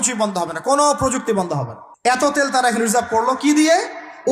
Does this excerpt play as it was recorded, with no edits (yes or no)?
no